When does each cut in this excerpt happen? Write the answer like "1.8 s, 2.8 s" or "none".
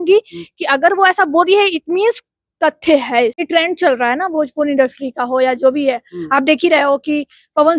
3.4 s